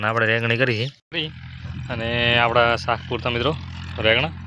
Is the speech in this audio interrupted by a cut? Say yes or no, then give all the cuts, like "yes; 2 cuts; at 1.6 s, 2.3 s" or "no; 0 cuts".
yes; 1 cut; at 1.0 s